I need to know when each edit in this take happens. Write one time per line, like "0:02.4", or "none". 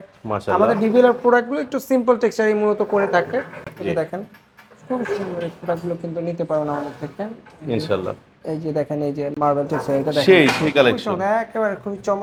none